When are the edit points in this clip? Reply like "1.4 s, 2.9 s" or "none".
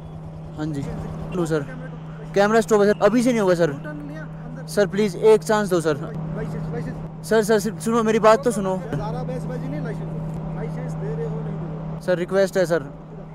1.3 s, 6.2 s, 9.1 s